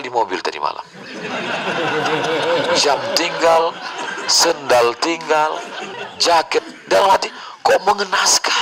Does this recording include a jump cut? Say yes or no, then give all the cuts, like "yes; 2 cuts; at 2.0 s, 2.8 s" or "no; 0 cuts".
no; 0 cuts